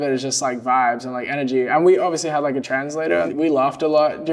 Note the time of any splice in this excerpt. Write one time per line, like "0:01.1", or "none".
0:03.3